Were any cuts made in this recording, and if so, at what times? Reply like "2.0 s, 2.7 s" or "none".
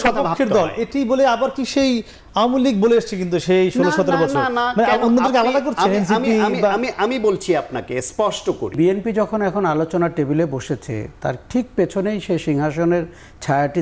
8.7 s